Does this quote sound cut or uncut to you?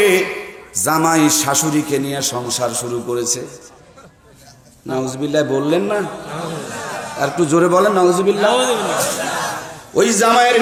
uncut